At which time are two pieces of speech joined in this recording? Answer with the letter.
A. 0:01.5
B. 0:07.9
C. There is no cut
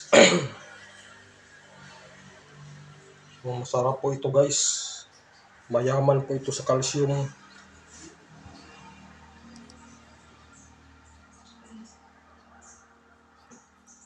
C